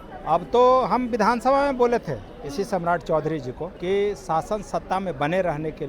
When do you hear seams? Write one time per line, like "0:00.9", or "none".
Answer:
0:03.7